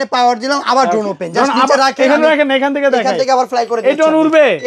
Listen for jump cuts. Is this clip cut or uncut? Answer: uncut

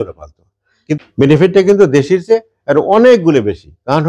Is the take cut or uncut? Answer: cut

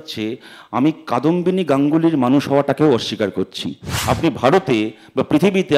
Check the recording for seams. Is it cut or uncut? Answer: cut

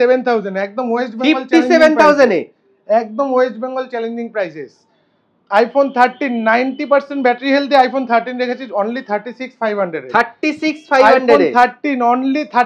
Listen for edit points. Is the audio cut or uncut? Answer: uncut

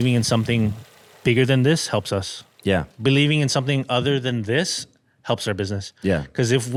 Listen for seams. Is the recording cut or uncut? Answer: uncut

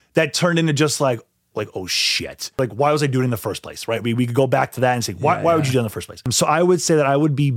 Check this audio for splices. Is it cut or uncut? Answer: cut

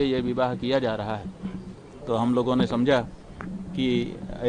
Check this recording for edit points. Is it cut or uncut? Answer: uncut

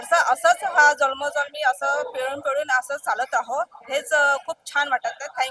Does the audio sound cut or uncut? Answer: uncut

